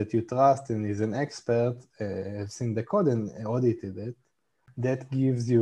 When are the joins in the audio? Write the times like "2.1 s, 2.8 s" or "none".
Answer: 4.6 s